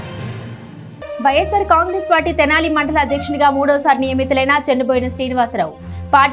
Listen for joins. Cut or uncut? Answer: uncut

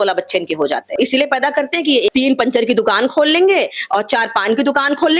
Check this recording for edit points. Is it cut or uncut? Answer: cut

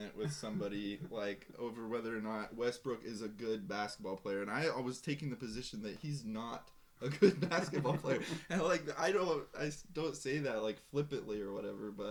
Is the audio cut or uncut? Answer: uncut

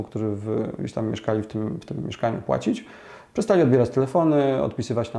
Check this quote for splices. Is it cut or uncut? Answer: uncut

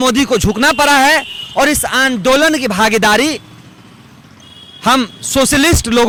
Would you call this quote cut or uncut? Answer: uncut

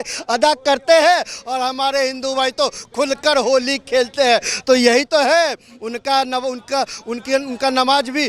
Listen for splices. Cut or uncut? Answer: uncut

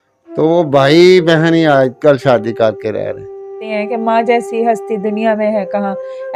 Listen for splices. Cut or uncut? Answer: cut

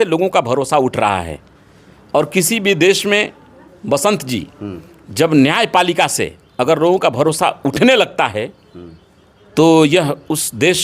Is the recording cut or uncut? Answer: uncut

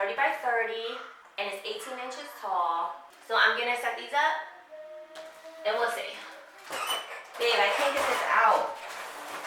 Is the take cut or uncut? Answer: cut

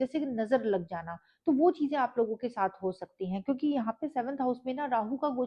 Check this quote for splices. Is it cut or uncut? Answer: uncut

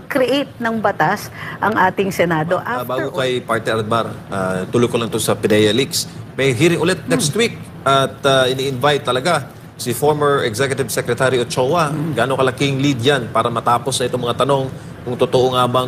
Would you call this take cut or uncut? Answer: cut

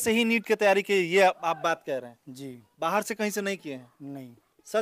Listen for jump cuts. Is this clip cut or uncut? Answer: uncut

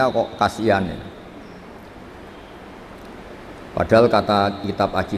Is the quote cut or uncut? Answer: uncut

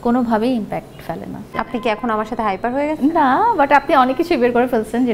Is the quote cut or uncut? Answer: cut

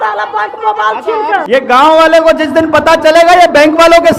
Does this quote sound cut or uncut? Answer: cut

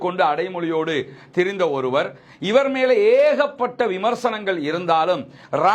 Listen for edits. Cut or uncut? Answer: uncut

